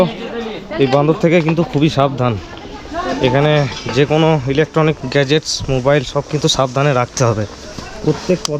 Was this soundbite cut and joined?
no; 0 cuts

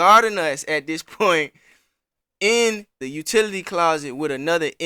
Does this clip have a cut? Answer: yes; 1 cut; at 3.0 s

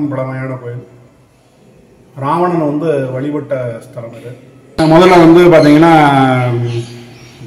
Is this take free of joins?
no; 1 cut; at 4.8 s

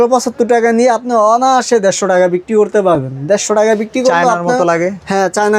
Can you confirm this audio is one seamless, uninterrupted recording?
yes; 0 cuts

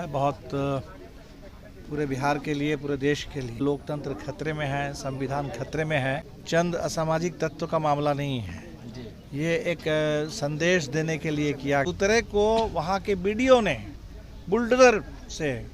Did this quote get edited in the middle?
yes; 3 cuts; at 3.6 s, 6.3 s, 11.8 s

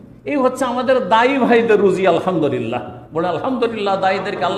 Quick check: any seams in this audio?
no; 0 cuts

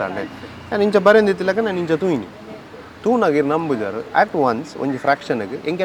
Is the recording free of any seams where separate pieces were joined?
yes; 0 cuts

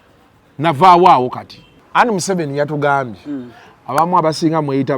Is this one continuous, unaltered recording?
no; 1 cut; at 1.7 s

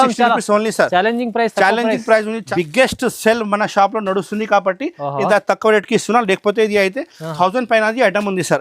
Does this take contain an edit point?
yes; 1 cut; at 2.4 s

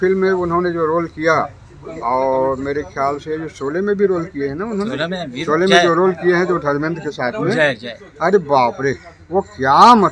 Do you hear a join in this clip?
no; 0 cuts

